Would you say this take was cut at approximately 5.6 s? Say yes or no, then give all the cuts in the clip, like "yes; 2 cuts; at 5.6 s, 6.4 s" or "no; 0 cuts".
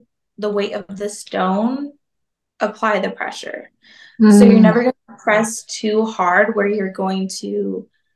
no; 0 cuts